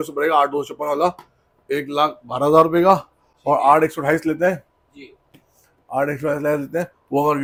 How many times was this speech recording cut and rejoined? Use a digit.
0